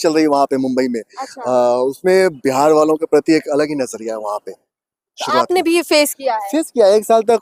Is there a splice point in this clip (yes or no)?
no